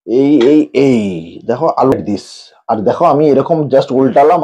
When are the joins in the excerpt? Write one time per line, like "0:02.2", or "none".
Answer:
0:01.9

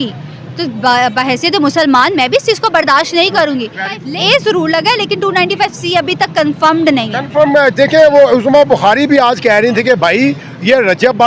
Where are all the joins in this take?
0:04.0

